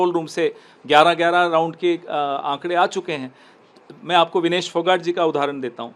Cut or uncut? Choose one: uncut